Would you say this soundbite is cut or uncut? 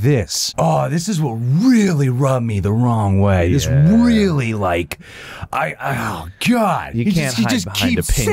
uncut